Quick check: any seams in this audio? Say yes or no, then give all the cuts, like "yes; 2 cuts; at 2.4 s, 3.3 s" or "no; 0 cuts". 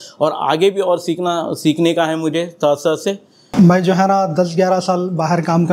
yes; 1 cut; at 3.3 s